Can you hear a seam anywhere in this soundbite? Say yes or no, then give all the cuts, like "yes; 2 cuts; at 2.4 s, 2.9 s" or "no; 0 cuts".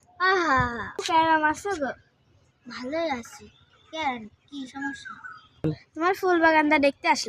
yes; 1 cut; at 1.0 s